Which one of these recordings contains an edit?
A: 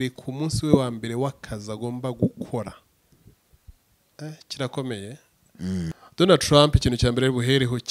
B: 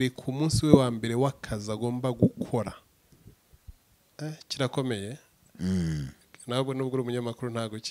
A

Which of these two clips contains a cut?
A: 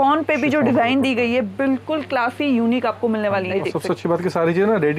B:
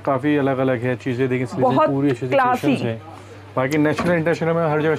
A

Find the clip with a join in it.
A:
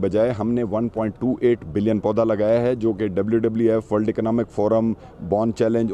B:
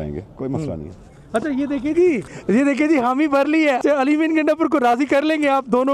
B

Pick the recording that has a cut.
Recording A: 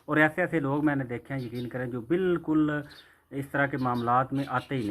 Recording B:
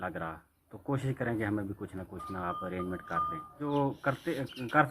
B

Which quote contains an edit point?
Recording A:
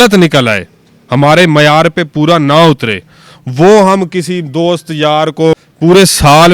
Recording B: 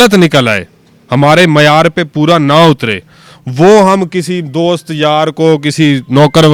A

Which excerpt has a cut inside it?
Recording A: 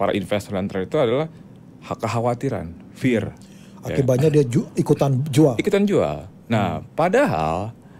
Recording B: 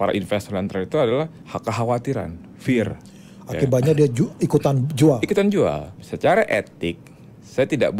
B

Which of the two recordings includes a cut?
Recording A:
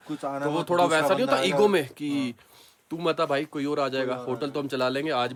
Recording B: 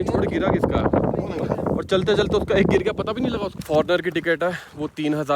B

